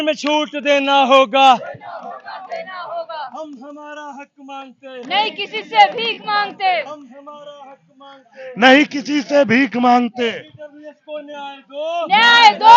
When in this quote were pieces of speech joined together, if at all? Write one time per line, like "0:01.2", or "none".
none